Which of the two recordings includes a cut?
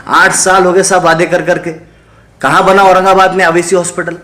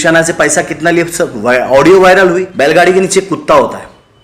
second; 1 cut; at 2.5 s

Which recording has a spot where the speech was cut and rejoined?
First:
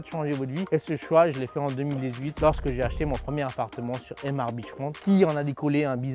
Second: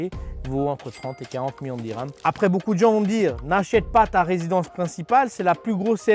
second; 1 cut; at 2.1 s

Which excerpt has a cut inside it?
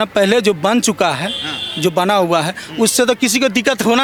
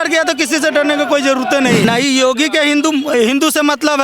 second; 1 cut; at 1.8 s

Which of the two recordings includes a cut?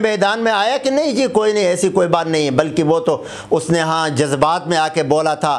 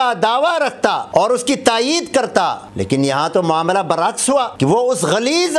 second; 3 cuts; at 1.0 s, 2.6 s, 4.5 s

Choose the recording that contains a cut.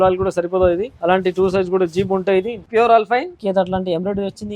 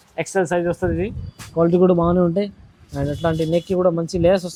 first; 3 cuts; at 0.9 s, 2.6 s, 3.3 s

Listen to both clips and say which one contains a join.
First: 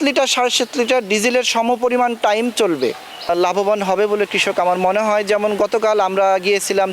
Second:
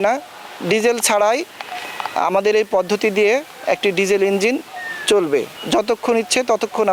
first; 1 cut; at 3.3 s

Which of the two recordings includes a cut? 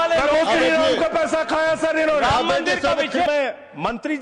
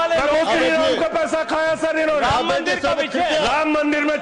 first; 1 cut; at 3.3 s

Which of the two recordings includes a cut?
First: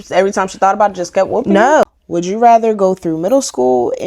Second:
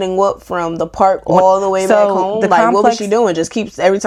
first; 1 cut; at 1.8 s

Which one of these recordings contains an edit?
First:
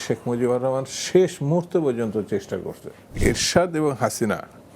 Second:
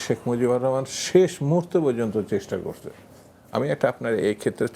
first; 1 cut; at 3.0 s

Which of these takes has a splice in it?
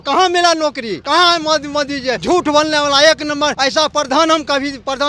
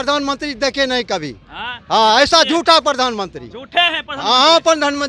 first; 3 cuts; at 0.9 s, 2.2 s, 3.6 s

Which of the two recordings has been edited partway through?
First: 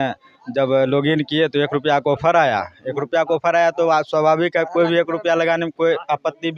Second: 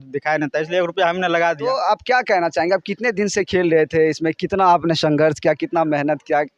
second; 1 cut; at 1.7 s

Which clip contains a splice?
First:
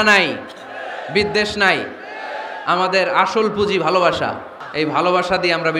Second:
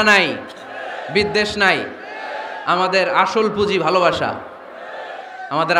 first; 1 cut; at 4.6 s

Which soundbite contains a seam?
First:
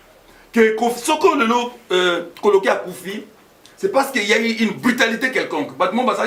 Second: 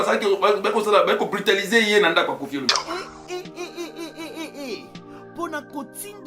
second; 1 cut; at 2.7 s

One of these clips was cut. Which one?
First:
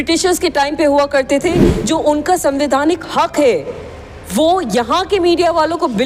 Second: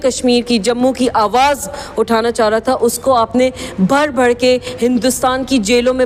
first; 1 cut; at 1.7 s

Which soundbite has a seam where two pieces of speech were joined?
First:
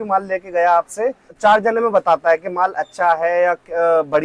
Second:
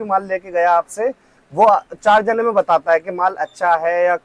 first; 1 cut; at 1.3 s

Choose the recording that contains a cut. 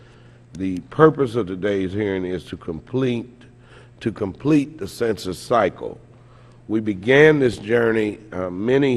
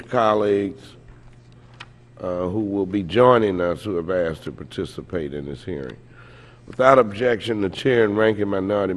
second; 1 cut; at 4.8 s

